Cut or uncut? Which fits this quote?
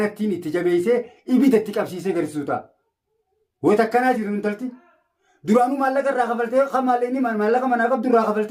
uncut